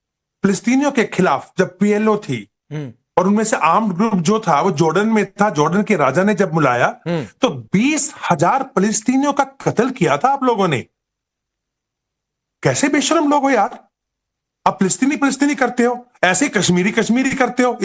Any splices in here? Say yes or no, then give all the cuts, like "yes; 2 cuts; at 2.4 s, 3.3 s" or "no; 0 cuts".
no; 0 cuts